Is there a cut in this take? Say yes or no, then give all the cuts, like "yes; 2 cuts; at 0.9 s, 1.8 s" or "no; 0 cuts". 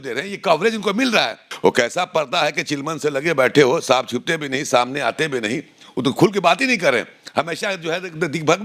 yes; 1 cut; at 1.4 s